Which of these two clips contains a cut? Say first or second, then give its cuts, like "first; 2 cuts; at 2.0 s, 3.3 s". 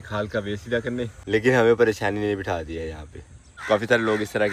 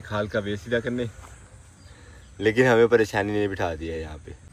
first; 2 cuts; at 1.2 s, 3.4 s